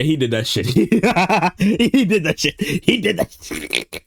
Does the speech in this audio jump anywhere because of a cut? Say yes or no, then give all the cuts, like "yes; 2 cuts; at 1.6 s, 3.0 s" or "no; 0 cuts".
no; 0 cuts